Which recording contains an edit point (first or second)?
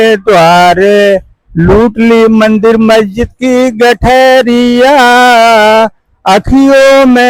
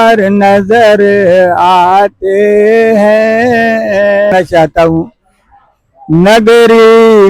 second